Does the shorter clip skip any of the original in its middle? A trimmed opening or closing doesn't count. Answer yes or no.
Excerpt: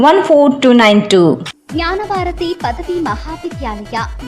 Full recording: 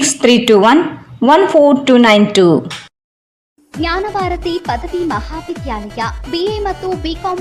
yes